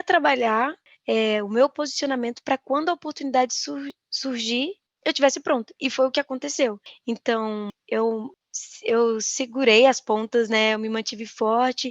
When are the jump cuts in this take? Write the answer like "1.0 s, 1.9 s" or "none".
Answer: none